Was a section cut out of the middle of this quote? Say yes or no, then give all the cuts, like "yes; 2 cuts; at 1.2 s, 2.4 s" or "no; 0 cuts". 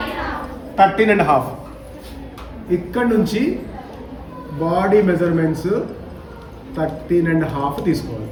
no; 0 cuts